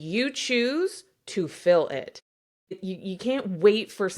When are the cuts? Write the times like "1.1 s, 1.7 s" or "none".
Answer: 2.7 s